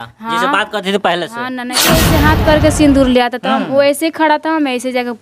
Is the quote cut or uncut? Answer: cut